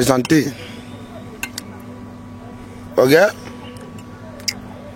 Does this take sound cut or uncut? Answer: uncut